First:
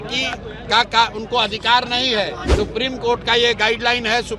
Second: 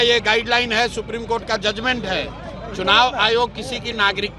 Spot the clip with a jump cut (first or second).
first